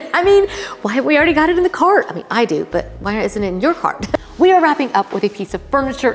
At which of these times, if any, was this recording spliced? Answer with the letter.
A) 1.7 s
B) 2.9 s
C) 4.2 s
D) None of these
C